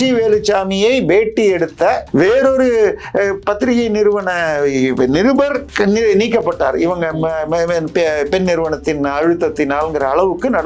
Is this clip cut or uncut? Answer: cut